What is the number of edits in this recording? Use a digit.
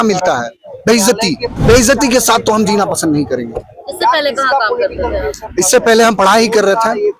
1